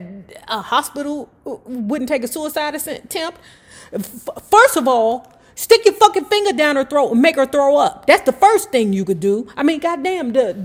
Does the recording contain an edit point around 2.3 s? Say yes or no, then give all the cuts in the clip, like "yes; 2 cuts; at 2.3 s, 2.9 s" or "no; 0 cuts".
no; 0 cuts